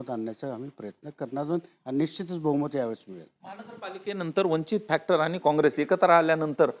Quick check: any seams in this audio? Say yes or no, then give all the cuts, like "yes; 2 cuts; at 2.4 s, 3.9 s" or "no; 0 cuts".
no; 0 cuts